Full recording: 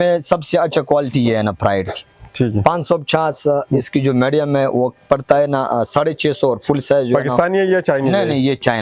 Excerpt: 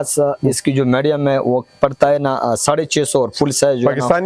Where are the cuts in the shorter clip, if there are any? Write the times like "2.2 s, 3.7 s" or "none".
none